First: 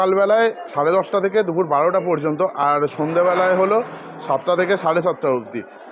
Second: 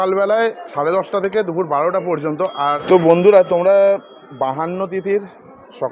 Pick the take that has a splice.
second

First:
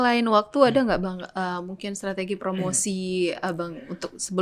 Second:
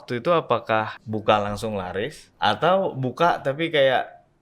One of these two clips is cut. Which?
second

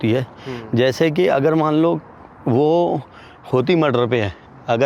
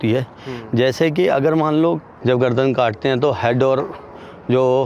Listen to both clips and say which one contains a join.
second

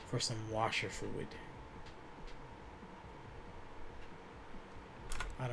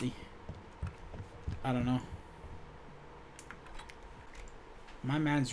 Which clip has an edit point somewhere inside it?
second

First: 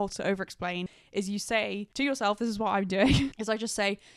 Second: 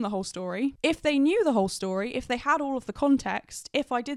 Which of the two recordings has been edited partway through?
first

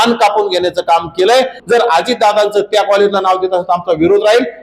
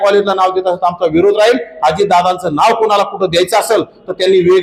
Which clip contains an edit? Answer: first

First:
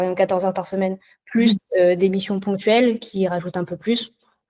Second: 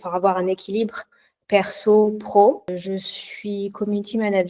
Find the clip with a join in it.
second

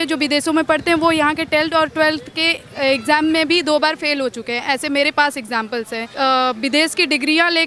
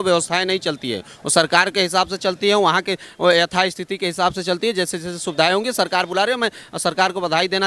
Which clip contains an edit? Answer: first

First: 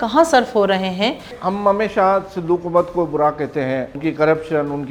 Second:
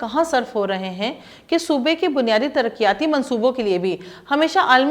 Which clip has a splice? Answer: first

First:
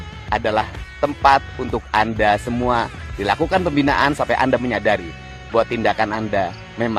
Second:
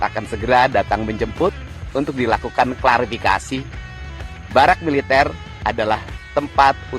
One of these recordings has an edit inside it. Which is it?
second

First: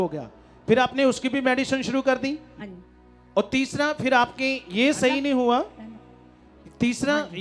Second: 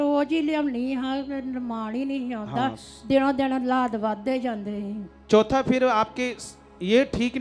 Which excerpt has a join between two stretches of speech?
first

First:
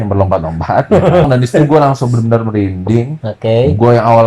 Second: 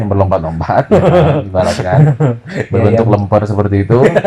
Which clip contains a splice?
first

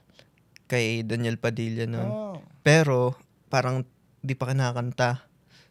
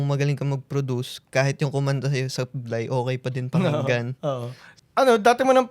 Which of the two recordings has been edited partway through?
second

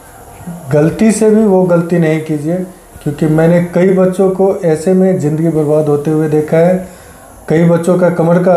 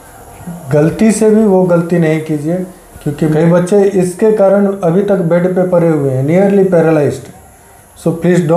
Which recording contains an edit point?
second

